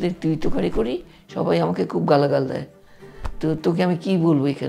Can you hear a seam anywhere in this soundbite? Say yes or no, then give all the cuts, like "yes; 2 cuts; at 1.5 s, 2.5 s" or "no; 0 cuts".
no; 0 cuts